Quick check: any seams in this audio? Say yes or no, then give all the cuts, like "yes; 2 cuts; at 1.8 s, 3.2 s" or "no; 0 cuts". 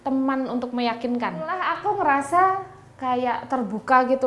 yes; 1 cut; at 1.7 s